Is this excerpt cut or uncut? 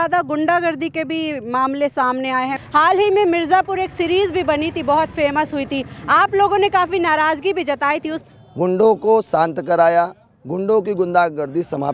cut